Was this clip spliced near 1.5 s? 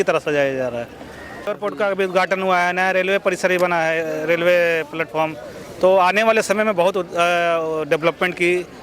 yes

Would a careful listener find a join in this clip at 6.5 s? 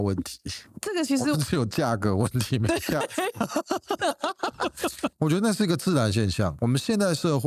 yes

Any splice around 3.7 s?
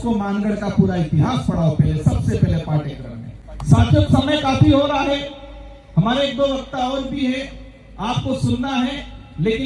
no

